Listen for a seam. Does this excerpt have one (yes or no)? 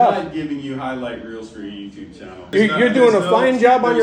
yes